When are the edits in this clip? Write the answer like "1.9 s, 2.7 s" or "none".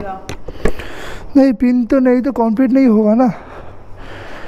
none